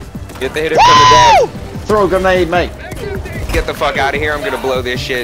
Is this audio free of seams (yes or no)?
no